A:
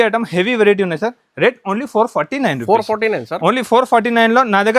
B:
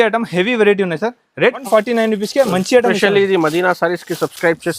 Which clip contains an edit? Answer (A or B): B